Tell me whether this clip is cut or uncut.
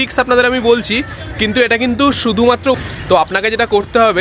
cut